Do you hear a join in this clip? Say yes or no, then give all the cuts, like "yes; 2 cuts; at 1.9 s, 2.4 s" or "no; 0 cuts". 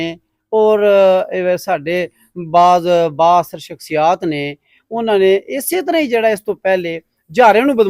no; 0 cuts